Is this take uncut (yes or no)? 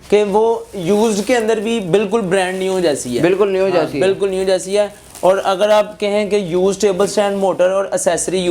yes